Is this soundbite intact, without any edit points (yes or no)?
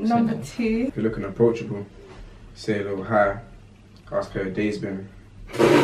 no